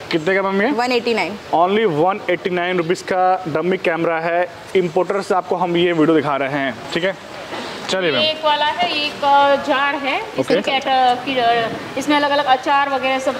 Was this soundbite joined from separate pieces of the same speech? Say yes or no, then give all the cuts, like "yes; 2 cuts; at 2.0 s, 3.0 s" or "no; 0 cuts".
no; 0 cuts